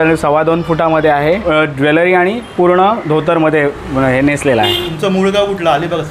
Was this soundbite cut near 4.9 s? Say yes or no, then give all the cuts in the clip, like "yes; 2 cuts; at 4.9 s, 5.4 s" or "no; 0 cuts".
yes; 2 cuts; at 1.4 s, 4.9 s